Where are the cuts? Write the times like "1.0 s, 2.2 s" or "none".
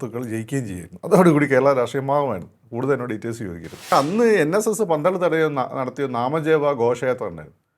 3.9 s